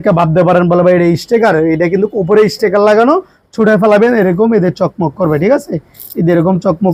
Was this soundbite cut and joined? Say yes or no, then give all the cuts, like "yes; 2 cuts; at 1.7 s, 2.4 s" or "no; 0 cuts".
no; 0 cuts